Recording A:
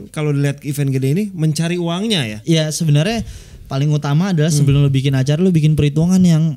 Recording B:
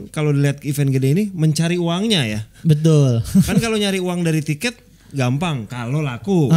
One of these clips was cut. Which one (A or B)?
A